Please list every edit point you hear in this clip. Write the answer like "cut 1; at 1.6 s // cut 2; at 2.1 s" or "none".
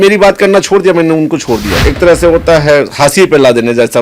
cut 1; at 1.8 s